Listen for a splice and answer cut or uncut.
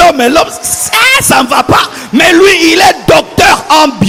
uncut